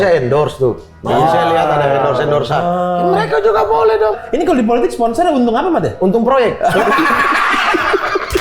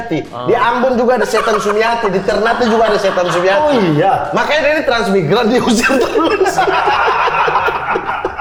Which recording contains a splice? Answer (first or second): first